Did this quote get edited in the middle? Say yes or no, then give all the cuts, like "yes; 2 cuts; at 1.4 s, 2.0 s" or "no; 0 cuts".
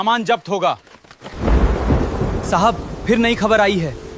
yes; 1 cut; at 1.2 s